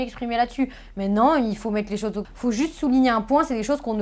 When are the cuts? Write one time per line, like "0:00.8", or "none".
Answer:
0:02.2